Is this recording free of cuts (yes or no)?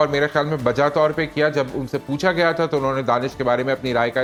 yes